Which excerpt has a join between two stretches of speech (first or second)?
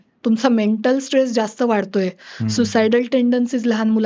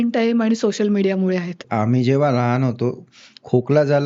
second